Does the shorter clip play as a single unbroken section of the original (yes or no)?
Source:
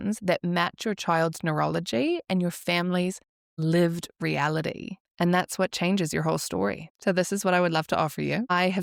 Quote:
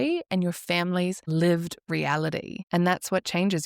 no